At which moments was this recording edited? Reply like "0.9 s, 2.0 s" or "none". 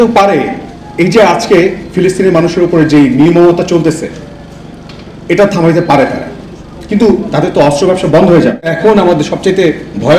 8.7 s